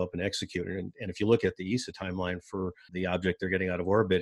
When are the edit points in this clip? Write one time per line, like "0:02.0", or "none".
0:02.9

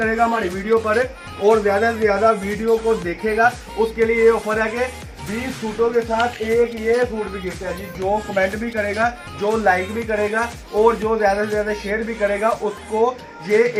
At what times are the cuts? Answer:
none

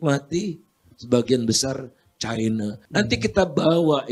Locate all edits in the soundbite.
0:02.8

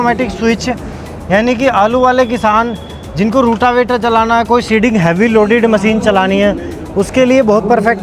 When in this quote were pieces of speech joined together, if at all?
none

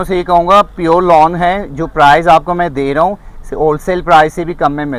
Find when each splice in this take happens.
none

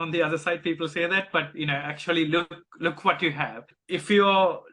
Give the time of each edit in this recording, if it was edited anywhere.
0:03.8

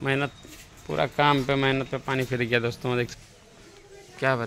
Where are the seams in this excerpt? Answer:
0:03.2

